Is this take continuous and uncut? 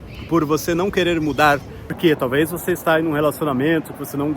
no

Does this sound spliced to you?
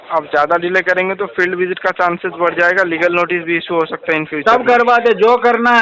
no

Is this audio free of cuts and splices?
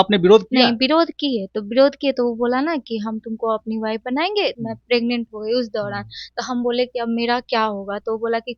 no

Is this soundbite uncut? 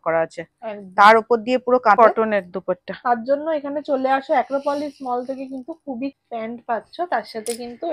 no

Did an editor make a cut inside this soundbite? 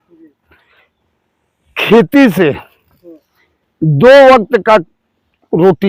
no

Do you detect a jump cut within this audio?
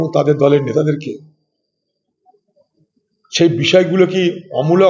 no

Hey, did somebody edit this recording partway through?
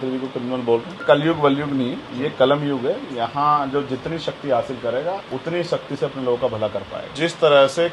yes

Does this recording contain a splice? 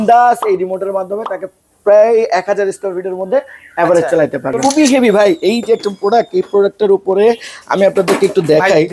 yes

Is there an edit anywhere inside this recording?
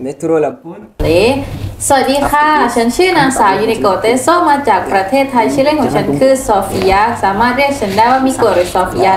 yes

